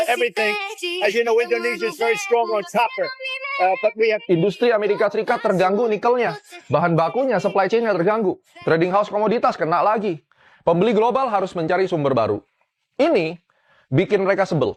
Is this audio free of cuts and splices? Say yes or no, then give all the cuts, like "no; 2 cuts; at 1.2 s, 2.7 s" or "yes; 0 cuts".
yes; 0 cuts